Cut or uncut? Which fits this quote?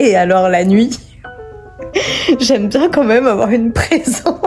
uncut